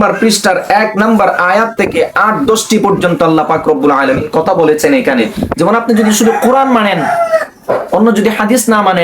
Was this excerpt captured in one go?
no; 1 cut; at 5.4 s

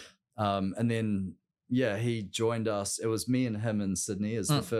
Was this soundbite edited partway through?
no; 0 cuts

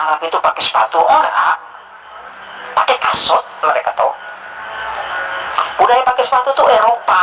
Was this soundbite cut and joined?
no; 0 cuts

